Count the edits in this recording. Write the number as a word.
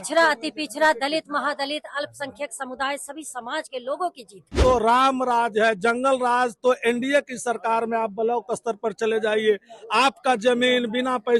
one